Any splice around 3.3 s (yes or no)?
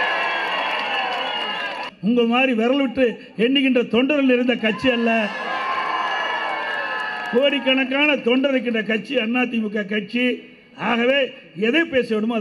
no